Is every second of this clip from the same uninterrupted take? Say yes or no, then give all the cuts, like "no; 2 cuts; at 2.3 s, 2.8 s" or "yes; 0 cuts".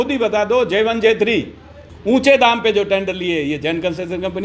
no; 1 cut; at 1.8 s